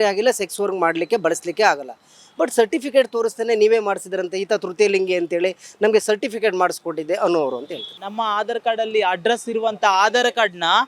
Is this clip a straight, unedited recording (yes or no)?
no